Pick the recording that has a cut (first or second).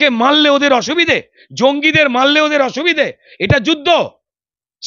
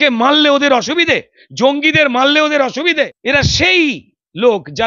second